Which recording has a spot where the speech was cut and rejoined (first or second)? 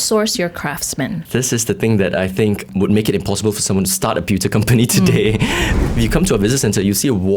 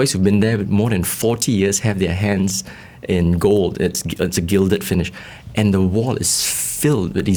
first